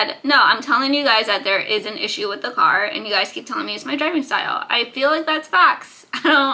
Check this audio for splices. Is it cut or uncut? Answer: uncut